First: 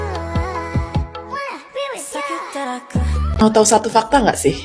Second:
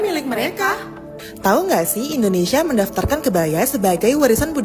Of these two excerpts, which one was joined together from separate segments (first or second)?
first